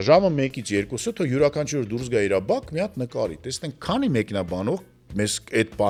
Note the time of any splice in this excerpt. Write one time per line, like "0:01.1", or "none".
none